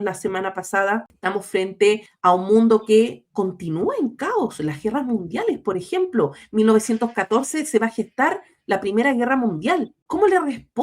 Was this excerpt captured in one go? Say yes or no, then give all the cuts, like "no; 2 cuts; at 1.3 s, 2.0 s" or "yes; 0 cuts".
no; 3 cuts; at 1.1 s, 2.1 s, 10.0 s